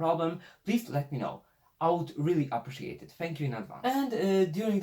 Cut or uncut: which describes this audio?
cut